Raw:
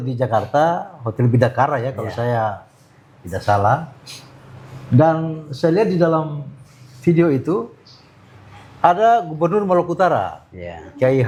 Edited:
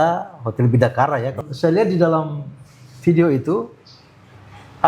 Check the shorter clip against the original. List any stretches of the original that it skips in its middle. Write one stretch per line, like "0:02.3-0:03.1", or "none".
0:02.0-0:05.4